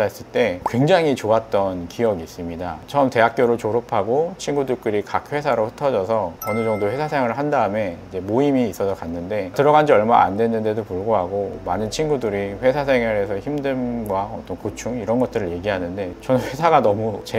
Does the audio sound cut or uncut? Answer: uncut